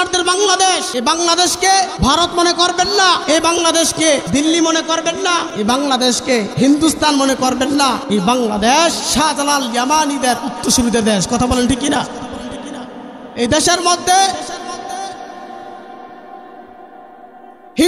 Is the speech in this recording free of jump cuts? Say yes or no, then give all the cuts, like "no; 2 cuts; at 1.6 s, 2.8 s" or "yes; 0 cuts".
no; 8 cuts; at 0.9 s, 1.9 s, 3.2 s, 4.2 s, 5.5 s, 6.5 s, 8.0 s, 9.0 s